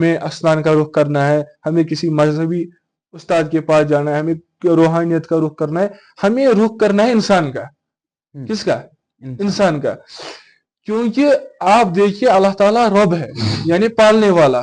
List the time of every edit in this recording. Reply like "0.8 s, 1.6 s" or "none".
none